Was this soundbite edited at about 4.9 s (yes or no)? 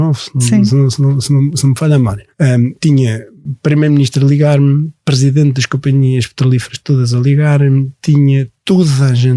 no